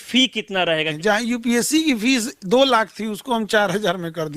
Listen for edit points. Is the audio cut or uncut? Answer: cut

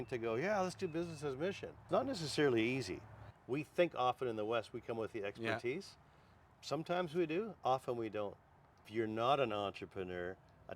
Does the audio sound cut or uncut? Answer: cut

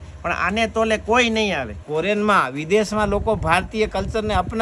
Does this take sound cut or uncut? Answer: cut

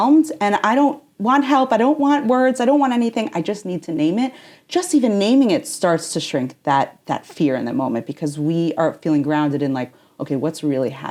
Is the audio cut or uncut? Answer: uncut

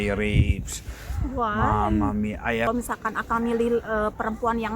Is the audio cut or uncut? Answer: cut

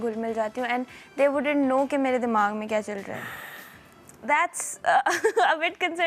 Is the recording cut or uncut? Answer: uncut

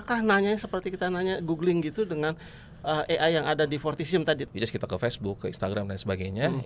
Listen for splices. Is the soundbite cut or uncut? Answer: cut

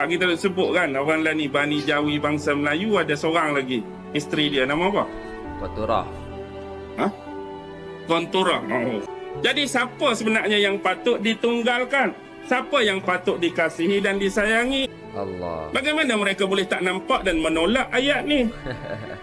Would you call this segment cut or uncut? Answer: cut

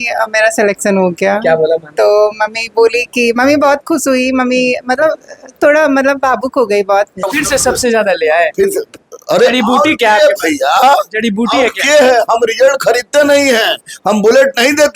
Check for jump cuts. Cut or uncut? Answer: cut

